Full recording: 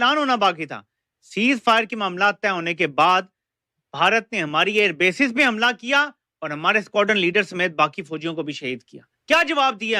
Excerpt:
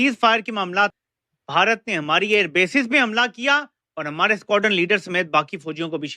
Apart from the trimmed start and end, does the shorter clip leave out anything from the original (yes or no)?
yes